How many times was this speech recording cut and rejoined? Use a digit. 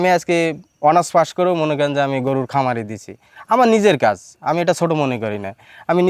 0